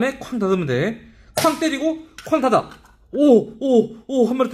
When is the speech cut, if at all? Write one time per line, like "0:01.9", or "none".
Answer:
none